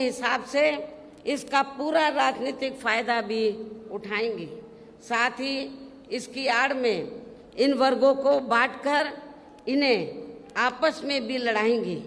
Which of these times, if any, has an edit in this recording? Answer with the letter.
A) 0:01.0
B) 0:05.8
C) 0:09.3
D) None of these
D